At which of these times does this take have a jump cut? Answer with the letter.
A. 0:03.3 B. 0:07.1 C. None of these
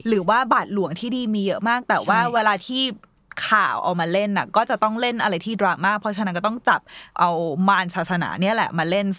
B